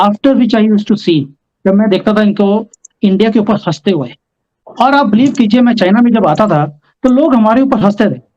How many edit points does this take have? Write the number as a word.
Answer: one